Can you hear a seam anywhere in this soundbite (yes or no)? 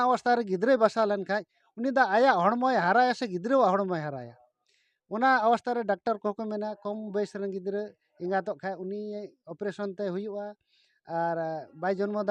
no